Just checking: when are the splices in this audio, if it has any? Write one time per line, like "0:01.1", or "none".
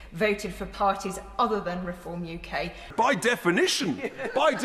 0:02.9